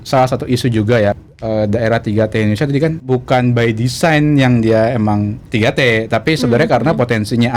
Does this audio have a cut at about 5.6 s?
no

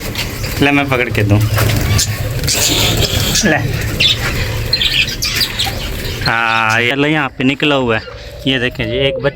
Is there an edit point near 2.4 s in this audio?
no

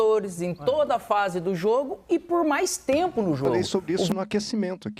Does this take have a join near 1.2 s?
no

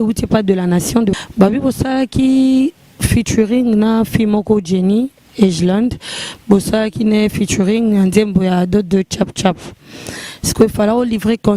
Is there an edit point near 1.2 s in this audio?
yes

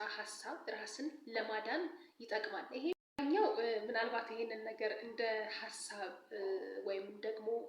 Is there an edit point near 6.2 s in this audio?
no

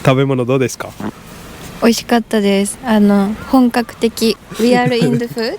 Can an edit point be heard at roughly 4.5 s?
yes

